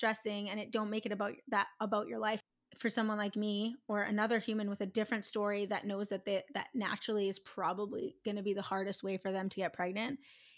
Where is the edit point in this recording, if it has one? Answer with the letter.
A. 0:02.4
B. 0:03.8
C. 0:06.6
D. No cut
A